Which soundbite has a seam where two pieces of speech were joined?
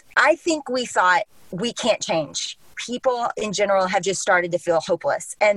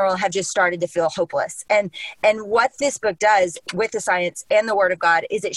first; 1 cut; at 2.7 s

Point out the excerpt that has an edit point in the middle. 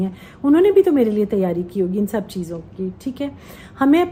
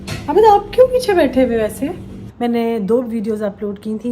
second; 1 cut; at 2.2 s

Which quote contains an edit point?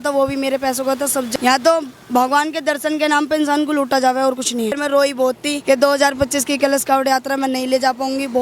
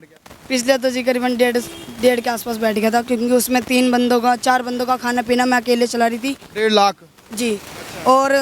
first; 3 cuts; at 1.3 s, 4.7 s, 5.5 s

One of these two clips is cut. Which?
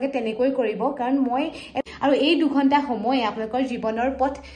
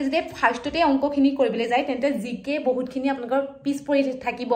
first; 1 cut; at 1.8 s

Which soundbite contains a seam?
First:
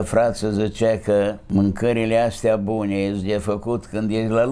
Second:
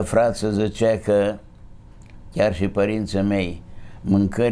first; 1 cut; at 1.4 s

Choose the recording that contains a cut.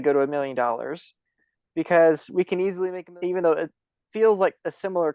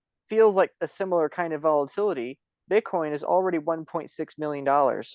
first; 1 cut; at 2.9 s

